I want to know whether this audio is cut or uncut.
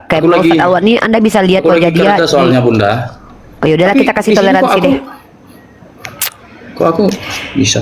uncut